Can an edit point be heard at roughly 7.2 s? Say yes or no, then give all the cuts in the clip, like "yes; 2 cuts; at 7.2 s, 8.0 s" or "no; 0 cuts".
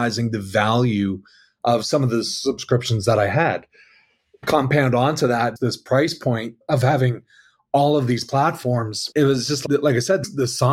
no; 3 cuts; at 4.4 s, 9.0 s, 9.6 s